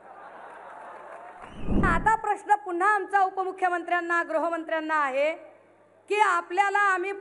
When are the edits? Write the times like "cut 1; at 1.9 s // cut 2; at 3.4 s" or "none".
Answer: cut 1; at 1.8 s